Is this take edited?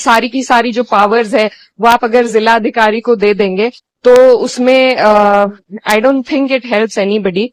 no; 0 cuts

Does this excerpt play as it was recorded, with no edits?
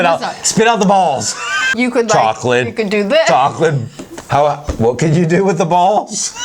no; 1 cut; at 1.7 s

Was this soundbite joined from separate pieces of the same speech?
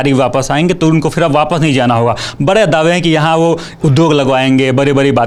no; 0 cuts

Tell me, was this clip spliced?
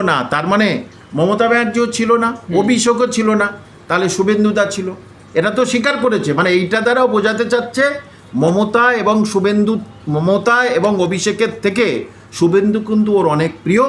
no; 0 cuts

